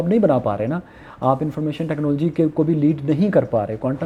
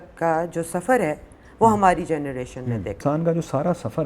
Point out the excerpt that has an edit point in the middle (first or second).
second